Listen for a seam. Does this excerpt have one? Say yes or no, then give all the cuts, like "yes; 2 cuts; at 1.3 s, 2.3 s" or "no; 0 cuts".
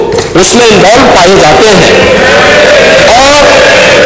no; 0 cuts